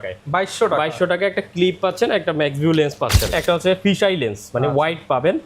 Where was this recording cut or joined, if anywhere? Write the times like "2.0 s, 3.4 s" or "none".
3.3 s